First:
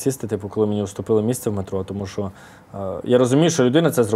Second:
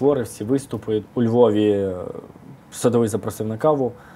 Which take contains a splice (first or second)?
second